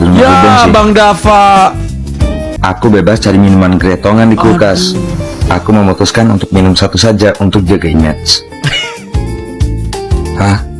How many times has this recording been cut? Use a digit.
1